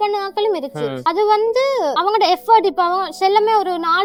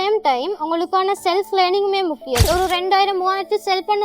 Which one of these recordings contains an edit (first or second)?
second